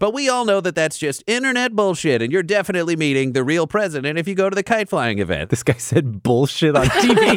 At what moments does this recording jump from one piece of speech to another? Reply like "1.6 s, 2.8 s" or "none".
5.4 s